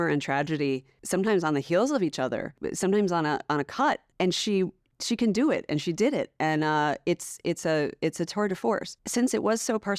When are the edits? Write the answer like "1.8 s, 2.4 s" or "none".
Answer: 0.9 s, 2.6 s, 4.1 s, 4.9 s, 8.9 s